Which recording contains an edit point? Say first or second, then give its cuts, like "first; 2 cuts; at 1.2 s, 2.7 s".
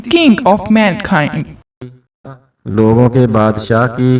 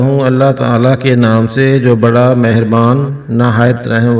first; 1 cut; at 1.9 s